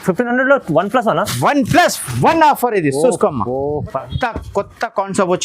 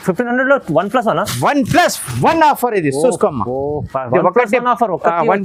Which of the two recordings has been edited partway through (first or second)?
first